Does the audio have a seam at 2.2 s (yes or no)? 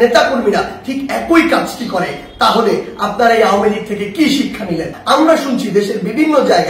no